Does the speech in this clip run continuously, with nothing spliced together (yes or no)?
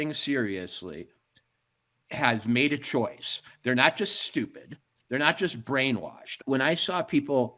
no